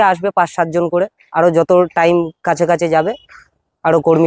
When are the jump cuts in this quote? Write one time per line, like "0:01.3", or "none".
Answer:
none